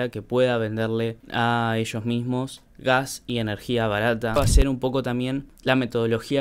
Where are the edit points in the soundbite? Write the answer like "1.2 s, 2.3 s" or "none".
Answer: 4.4 s